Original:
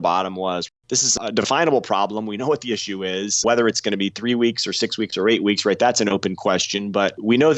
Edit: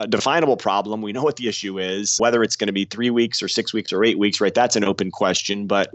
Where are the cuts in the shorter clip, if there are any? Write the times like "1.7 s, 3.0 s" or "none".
none